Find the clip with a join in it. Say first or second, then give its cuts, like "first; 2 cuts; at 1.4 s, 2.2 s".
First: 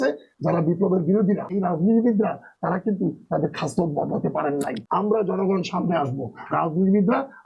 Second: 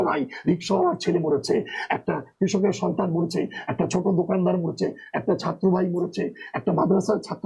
first; 2 cuts; at 1.6 s, 4.8 s